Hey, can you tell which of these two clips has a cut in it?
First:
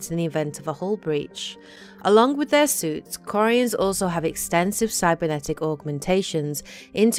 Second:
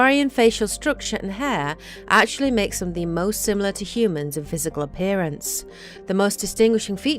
second; 1 cut; at 1.3 s

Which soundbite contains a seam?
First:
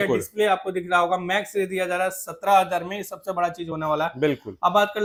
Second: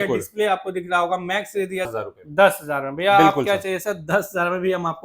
second; 1 cut; at 1.9 s

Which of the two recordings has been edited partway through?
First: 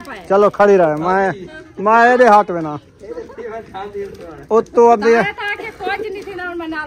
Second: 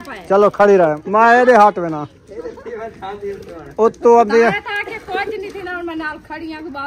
second; 1 cut; at 1.0 s

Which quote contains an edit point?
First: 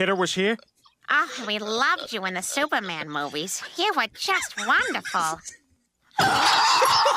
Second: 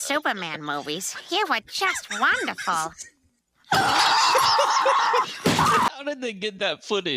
second; 1 cut; at 5.9 s

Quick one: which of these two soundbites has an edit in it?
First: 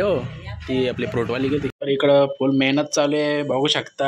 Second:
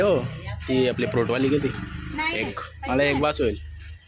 first; 1 cut; at 1.8 s

